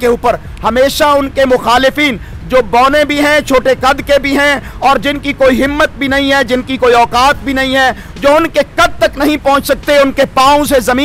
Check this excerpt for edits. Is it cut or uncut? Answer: uncut